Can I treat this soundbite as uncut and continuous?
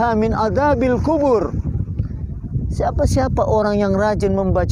yes; 0 cuts

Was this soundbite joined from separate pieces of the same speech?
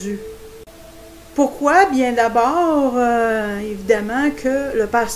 yes; 1 cut; at 3.0 s

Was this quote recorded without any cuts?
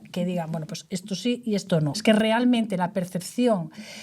no; 1 cut; at 1.9 s

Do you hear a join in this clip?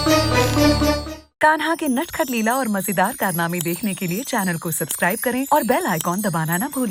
yes; 1 cut; at 1.0 s

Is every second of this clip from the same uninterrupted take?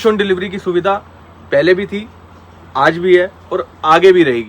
yes; 0 cuts

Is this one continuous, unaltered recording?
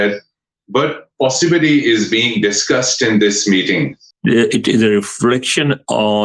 no; 1 cut; at 4.0 s

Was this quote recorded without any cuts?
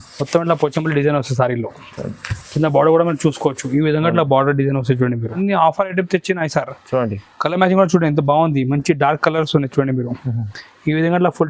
no; 1 cut; at 5.3 s

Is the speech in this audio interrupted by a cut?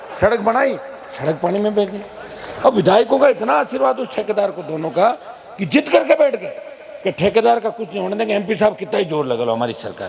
no; 0 cuts

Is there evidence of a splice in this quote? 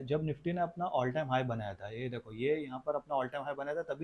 no; 0 cuts

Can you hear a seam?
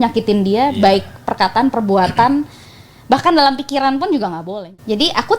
yes; 1 cut; at 4.5 s

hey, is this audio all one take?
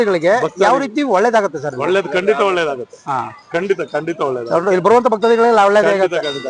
yes; 0 cuts

